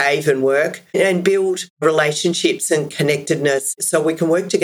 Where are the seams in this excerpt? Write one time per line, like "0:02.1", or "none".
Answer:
0:03.8